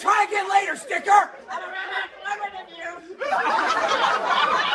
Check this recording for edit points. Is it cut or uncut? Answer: uncut